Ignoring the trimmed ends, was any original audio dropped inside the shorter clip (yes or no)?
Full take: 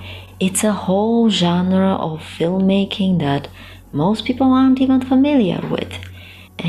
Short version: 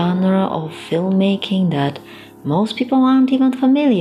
no